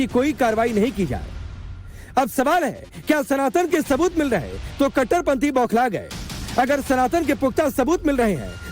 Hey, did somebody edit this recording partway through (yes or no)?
yes